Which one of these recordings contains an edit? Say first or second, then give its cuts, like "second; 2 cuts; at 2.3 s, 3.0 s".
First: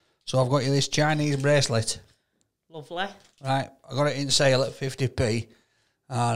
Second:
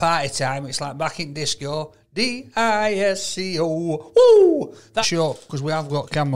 second; 1 cut; at 5.1 s